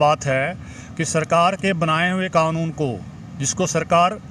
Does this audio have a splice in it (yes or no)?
no